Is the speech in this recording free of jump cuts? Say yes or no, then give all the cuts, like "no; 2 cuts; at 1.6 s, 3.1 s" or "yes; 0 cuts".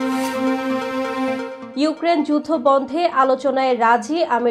yes; 0 cuts